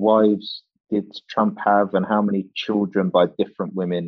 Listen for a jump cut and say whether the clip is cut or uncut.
uncut